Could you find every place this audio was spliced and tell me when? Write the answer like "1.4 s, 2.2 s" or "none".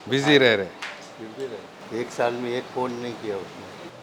1.8 s